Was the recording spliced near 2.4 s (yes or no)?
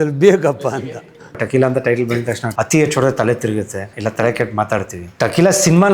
yes